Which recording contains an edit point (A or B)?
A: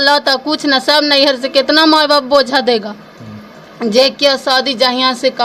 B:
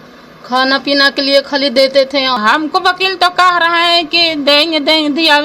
B